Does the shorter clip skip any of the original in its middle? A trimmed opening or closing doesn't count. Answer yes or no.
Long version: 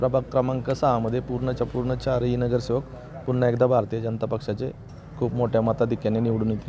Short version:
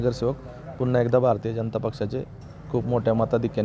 no